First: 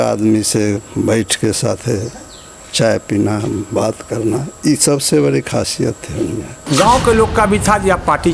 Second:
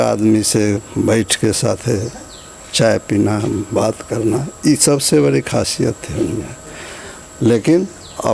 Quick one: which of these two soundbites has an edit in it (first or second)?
first